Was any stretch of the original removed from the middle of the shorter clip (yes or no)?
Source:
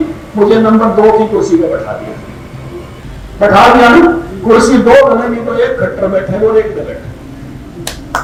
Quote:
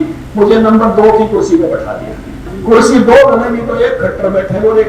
yes